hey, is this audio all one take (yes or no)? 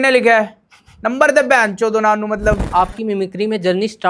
no